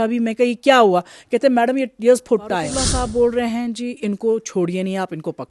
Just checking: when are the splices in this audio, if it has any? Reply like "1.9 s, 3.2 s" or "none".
2.8 s